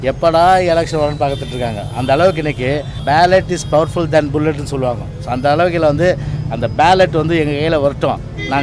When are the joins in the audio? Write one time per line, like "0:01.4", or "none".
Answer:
0:02.9